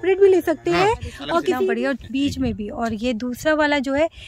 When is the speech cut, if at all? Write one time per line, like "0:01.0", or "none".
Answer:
0:01.6

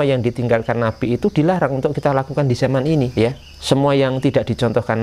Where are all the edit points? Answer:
0:03.1

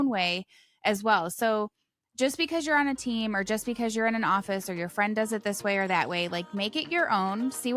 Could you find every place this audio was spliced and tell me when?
none

